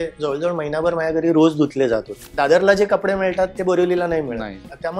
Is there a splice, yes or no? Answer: yes